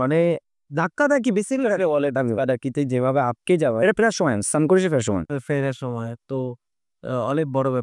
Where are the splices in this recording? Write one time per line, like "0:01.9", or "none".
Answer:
none